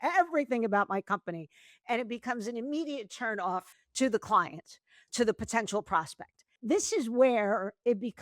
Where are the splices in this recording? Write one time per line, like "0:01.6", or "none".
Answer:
0:03.8
0:06.5